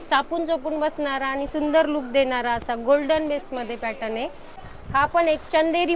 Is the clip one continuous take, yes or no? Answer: no